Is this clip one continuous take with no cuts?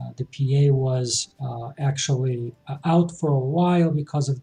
yes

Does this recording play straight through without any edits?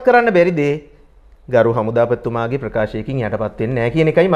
yes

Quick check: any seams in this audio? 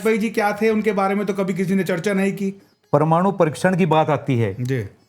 yes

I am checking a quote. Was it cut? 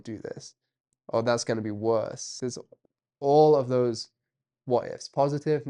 yes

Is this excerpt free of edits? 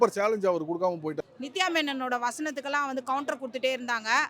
no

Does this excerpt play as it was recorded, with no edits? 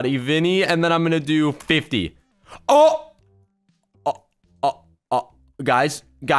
yes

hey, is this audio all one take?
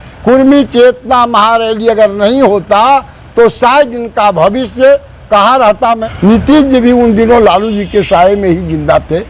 no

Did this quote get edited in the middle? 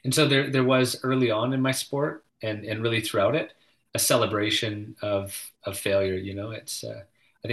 no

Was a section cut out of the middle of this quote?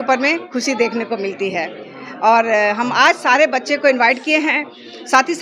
no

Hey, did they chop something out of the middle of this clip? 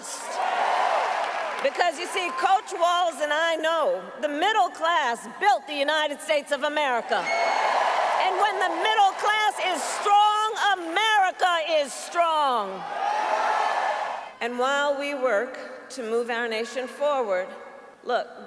no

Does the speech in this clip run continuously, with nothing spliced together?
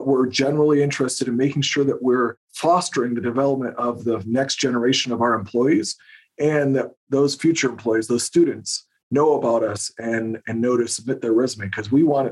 yes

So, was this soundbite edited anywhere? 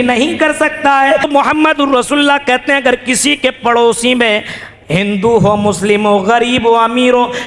yes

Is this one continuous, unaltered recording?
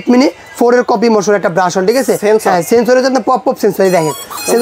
yes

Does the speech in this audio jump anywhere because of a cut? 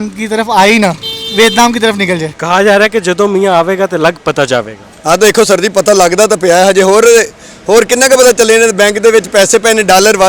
yes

